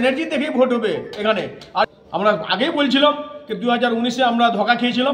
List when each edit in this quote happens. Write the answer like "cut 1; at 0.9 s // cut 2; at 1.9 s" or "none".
cut 1; at 1.8 s